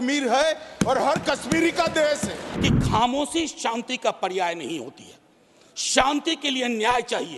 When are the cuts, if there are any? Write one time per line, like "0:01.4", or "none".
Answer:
0:02.4